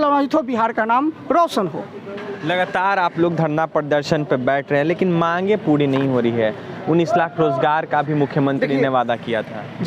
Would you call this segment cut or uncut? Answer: uncut